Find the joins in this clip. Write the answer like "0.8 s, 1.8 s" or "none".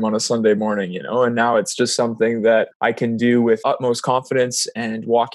2.7 s, 3.6 s